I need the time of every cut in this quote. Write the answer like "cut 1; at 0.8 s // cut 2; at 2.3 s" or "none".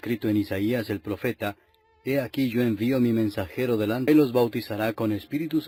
none